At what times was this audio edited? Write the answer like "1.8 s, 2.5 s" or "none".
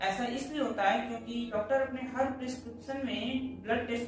1.5 s